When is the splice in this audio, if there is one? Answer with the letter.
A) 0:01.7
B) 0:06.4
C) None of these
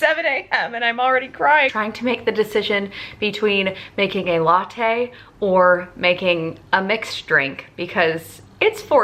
A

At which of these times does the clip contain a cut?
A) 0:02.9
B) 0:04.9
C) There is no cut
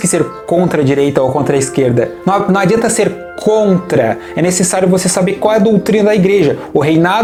C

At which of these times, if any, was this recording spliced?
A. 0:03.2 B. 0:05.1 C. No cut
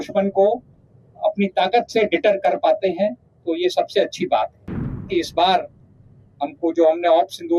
B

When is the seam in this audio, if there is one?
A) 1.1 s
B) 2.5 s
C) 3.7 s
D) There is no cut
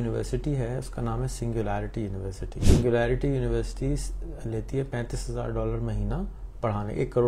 B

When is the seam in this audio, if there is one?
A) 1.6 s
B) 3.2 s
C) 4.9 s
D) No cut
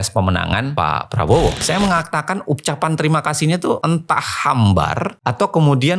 A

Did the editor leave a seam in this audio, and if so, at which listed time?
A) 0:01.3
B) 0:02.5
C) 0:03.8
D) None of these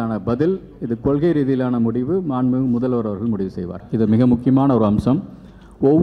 C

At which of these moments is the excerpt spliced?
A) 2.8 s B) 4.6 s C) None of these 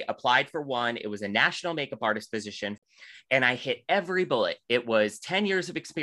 A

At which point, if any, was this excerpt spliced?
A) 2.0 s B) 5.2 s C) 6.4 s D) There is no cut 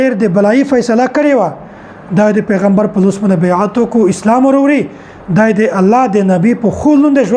D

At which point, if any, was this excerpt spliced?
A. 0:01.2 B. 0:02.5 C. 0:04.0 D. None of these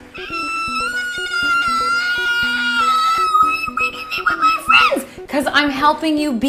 D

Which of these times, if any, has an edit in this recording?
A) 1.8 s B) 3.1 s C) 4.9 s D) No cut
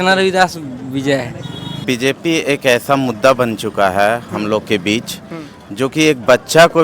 A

